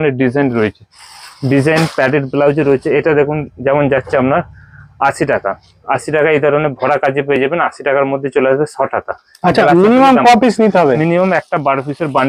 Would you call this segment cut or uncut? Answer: uncut